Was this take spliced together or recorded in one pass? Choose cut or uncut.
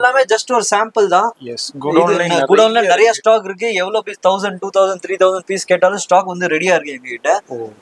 uncut